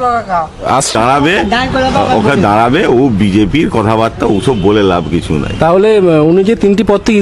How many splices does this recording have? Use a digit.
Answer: 1